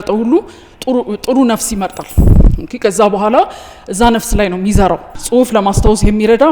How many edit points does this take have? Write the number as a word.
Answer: one